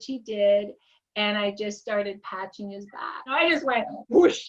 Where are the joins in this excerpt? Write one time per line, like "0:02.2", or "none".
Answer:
0:03.3

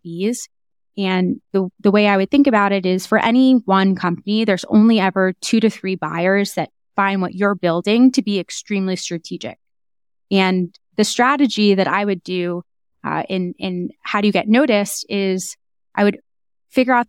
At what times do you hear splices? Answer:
none

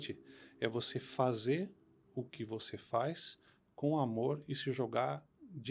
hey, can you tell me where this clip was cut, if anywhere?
none

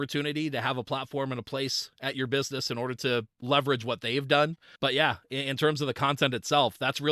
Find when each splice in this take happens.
0:03.3
0:04.6

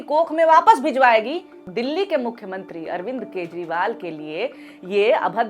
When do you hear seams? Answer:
0:01.6

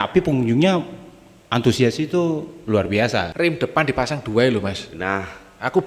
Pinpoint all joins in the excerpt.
0:03.3

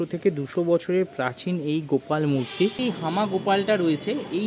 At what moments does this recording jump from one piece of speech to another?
0:02.8

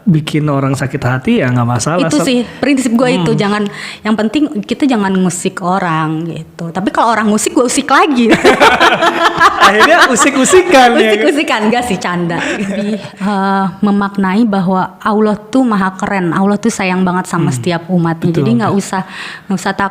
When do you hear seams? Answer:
0:12.7

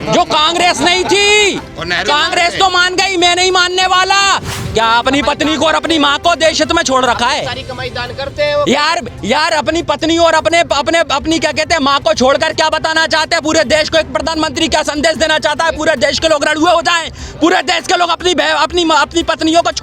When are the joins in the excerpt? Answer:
0:04.6

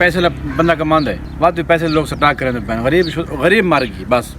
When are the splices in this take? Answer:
0:01.2

